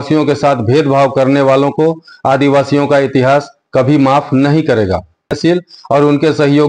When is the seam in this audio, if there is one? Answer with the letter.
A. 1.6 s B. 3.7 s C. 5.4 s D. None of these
C